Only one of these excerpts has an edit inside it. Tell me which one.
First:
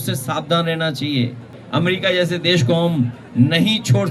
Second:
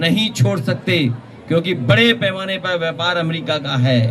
first; 1 cut; at 1.6 s

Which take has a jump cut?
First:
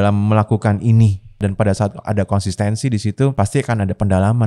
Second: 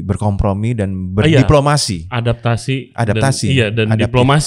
first; 2 cuts; at 1.4 s, 3.3 s

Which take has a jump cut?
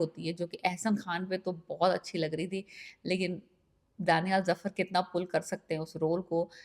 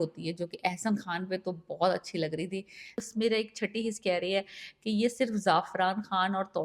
second; 1 cut; at 3.0 s

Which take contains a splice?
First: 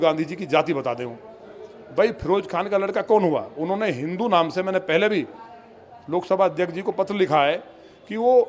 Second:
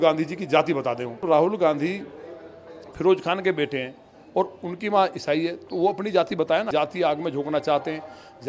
second; 2 cuts; at 1.2 s, 6.7 s

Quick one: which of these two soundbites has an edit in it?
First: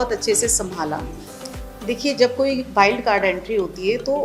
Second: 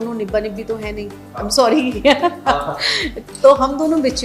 first; 1 cut; at 1.2 s

